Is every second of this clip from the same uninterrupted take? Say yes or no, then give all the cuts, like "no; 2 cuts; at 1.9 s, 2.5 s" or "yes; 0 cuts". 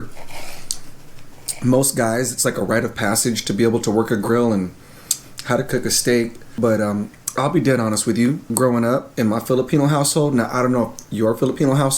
no; 3 cuts; at 6.4 s, 8.5 s, 9.1 s